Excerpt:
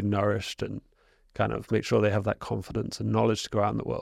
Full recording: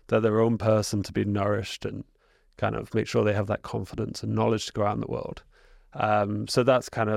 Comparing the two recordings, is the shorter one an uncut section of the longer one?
yes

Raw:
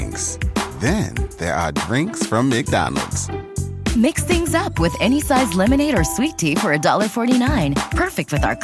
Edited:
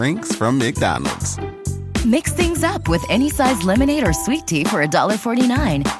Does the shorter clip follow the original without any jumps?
yes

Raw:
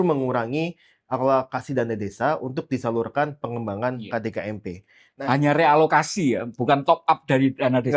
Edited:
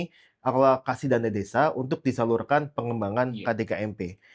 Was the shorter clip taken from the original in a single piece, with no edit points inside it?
yes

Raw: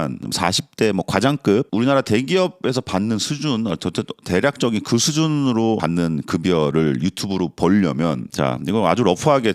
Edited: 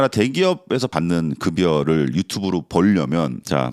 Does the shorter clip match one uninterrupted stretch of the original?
no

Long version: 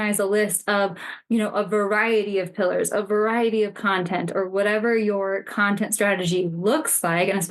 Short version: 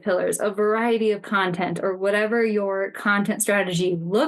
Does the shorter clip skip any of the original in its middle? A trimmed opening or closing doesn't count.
no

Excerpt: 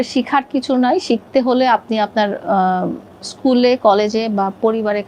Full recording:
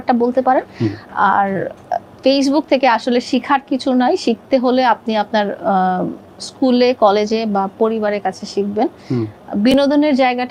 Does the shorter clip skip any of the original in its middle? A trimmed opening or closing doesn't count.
no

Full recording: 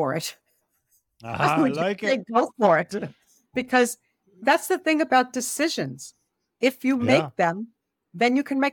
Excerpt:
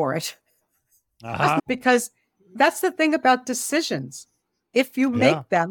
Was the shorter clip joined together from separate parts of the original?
yes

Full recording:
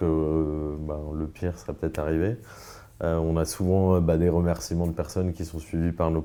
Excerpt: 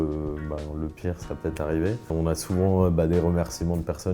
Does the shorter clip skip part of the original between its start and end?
yes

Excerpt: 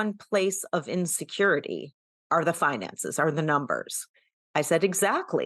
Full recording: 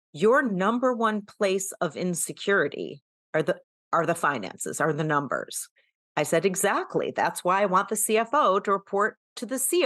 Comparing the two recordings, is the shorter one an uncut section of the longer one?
no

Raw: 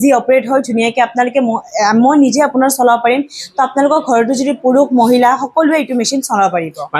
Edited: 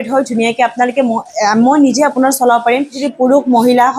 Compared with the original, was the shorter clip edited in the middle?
yes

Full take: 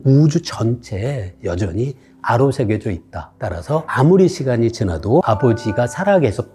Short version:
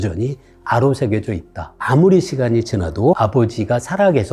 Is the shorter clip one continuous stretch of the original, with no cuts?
no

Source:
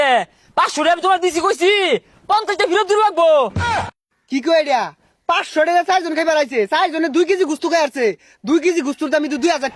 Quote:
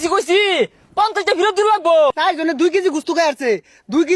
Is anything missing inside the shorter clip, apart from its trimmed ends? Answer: yes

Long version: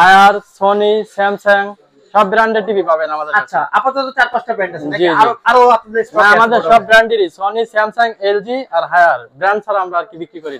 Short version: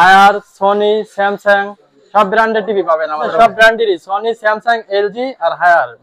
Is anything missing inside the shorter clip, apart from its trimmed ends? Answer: yes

